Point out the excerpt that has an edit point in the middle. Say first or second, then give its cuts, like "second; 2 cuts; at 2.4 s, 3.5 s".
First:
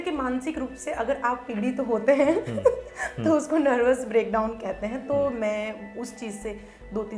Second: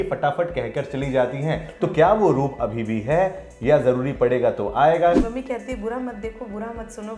second; 1 cut; at 5.2 s